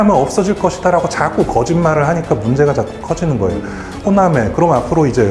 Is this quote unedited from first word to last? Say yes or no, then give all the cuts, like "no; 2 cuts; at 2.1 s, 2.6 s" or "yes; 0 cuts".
yes; 0 cuts